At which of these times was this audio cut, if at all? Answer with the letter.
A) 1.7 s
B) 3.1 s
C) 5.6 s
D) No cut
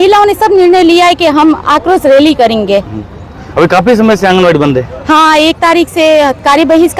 D